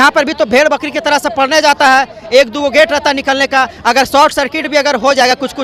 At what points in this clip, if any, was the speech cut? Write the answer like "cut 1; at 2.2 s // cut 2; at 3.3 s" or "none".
none